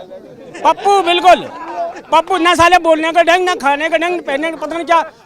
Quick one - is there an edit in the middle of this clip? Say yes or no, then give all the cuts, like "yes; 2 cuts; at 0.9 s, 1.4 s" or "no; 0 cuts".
no; 0 cuts